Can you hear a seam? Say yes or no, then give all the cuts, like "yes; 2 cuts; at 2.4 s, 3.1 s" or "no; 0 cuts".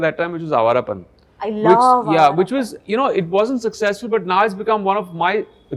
no; 0 cuts